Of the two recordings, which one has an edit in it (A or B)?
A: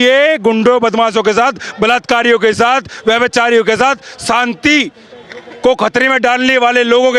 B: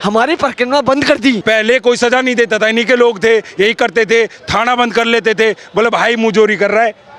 B